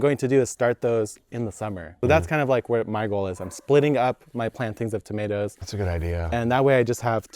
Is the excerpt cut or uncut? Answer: cut